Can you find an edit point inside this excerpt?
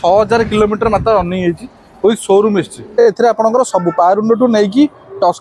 yes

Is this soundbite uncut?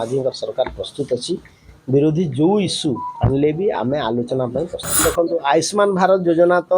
no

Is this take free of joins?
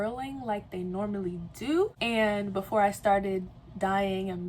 no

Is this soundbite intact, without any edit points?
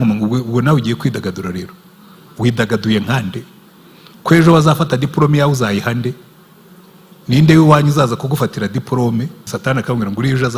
no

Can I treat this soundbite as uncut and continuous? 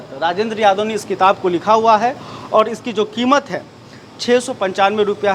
yes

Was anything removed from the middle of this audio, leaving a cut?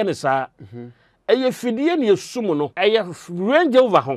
yes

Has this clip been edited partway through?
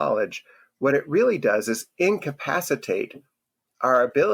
no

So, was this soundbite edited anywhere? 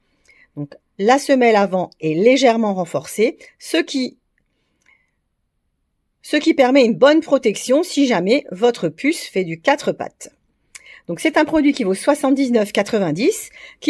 no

